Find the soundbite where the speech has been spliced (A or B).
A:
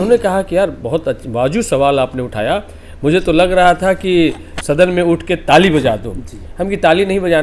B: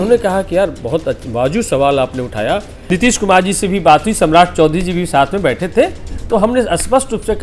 B